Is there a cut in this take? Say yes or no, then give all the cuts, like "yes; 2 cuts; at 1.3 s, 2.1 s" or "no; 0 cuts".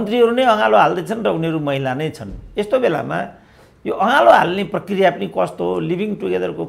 no; 0 cuts